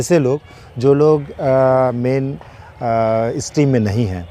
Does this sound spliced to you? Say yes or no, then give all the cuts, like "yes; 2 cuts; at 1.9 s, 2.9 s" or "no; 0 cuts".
no; 0 cuts